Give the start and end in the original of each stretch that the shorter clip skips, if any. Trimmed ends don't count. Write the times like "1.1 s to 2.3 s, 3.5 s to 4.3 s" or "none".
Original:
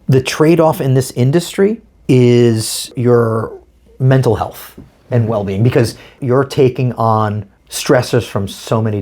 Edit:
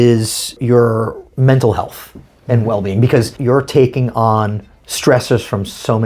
3.6 s to 3.9 s, 6.0 s to 6.2 s